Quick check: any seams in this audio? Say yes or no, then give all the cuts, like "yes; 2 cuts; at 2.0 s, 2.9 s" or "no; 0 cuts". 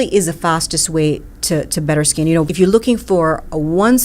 yes; 1 cut; at 2.5 s